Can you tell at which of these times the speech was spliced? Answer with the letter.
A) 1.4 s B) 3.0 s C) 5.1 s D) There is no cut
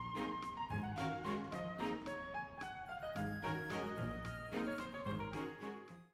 D